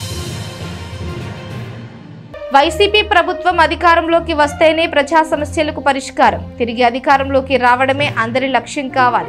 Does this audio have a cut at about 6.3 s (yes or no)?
no